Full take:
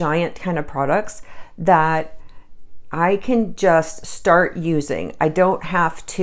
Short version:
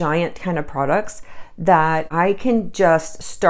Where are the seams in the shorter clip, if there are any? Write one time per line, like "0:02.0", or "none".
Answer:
0:02.1